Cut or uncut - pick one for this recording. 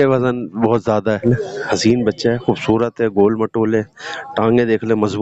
cut